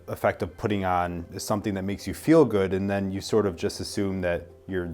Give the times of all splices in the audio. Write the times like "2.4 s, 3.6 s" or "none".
1.3 s